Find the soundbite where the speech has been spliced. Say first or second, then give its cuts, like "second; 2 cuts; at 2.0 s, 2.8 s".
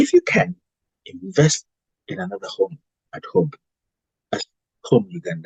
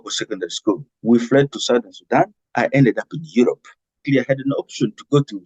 second; 3 cuts; at 0.9 s, 2.4 s, 4.0 s